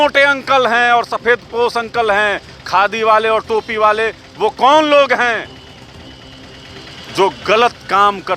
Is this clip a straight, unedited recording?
yes; 0 cuts

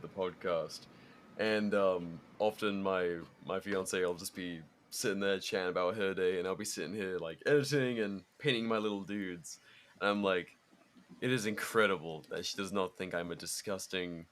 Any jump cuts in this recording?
yes; 1 cut; at 2.2 s

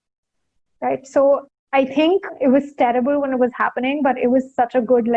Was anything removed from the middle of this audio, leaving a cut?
yes; 1 cut; at 2.0 s

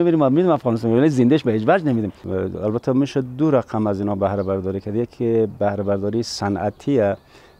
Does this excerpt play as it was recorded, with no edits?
no; 1 cut; at 2.2 s

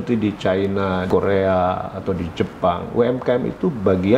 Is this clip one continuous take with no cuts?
no; 1 cut; at 1.0 s

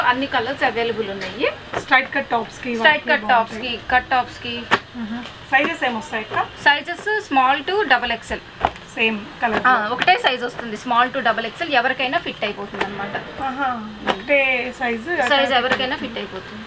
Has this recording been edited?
no; 0 cuts

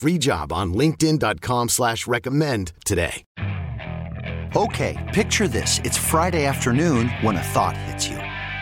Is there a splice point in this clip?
yes; 1 cut; at 3.2 s

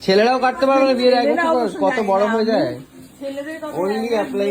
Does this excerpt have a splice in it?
no; 0 cuts

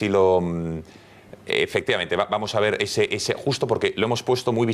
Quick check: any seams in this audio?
no; 0 cuts

